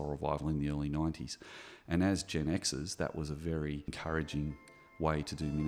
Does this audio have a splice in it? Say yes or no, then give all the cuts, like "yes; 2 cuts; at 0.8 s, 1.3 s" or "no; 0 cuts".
yes; 1 cut; at 4.0 s